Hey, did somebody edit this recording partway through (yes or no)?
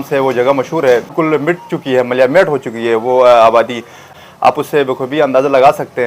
yes